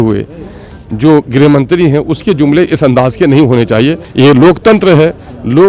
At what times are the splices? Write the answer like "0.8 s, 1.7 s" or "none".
4.0 s